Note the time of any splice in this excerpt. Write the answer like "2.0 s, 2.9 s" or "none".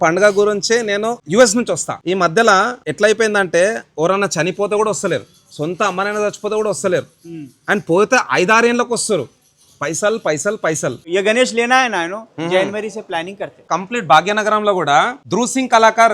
1.2 s, 1.9 s, 2.8 s, 11.0 s, 13.8 s, 15.2 s